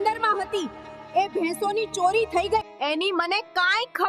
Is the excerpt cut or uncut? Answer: cut